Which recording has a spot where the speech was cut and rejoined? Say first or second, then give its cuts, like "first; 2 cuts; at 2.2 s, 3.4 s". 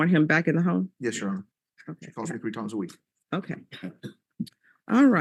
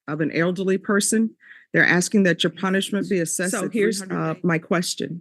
second; 1 cut; at 3.5 s